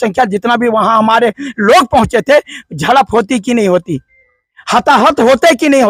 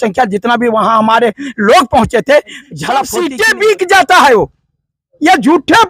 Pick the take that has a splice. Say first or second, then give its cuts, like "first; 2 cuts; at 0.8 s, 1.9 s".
second; 1 cut; at 3.1 s